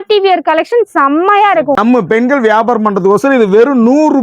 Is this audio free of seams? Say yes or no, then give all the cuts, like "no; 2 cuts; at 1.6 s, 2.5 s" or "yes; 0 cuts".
no; 1 cut; at 1.8 s